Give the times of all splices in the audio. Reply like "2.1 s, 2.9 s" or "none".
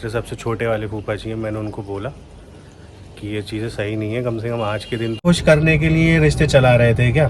5.2 s